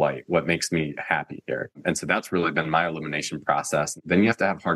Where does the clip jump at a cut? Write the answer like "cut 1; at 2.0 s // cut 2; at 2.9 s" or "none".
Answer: cut 1; at 1.8 s // cut 2; at 4.0 s